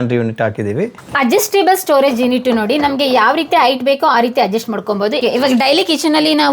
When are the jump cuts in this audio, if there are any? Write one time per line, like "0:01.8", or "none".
0:01.1
0:05.2